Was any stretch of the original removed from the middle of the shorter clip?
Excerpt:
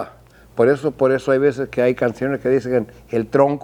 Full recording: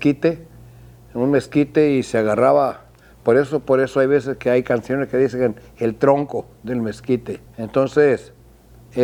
no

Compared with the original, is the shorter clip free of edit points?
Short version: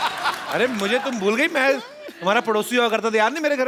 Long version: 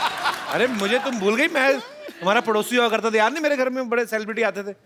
yes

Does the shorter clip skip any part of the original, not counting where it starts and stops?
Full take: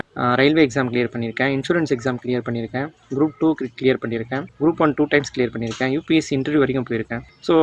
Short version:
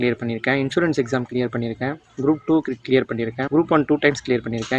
yes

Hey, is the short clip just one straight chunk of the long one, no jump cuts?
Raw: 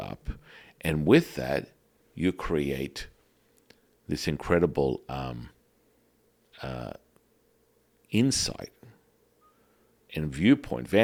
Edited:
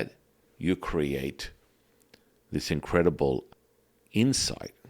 no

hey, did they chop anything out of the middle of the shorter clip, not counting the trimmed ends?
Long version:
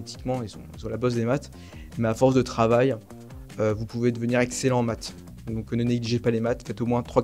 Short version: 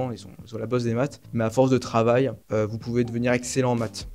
yes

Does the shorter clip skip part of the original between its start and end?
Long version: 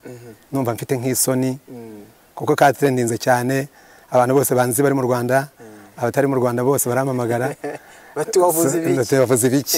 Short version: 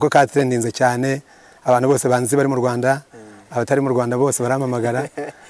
no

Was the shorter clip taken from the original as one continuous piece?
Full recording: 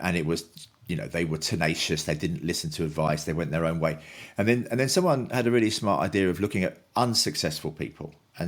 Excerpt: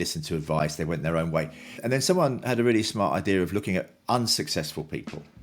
no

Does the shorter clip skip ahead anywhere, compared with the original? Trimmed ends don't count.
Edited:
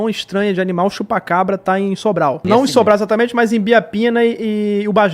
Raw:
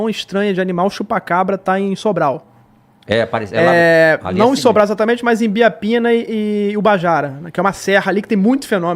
yes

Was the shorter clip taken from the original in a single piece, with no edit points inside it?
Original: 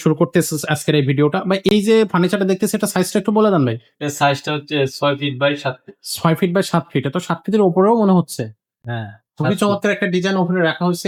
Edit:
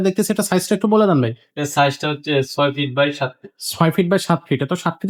yes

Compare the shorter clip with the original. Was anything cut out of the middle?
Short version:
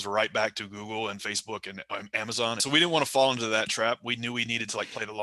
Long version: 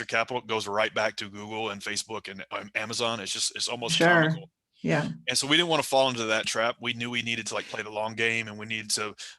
yes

